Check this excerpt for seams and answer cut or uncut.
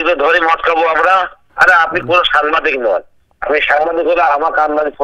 cut